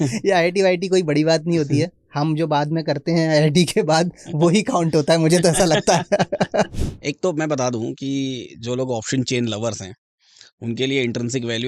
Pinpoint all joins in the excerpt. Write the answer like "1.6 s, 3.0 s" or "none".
6.7 s

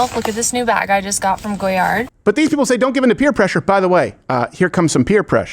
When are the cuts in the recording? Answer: 2.1 s

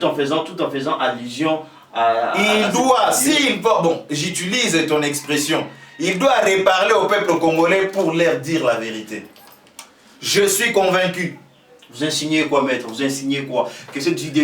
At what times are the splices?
none

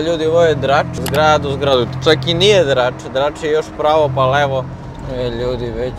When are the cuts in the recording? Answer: 4.8 s

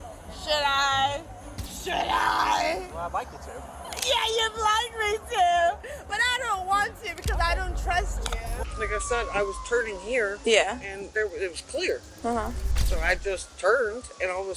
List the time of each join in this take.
8.6 s

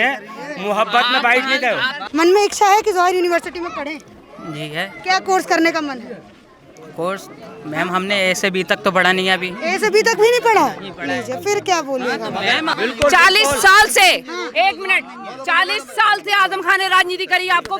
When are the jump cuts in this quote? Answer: 1.9 s, 12.7 s

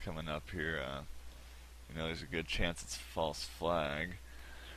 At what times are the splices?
3.1 s

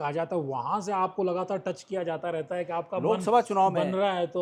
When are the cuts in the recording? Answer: none

